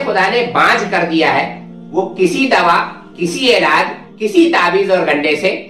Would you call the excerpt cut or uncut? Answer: uncut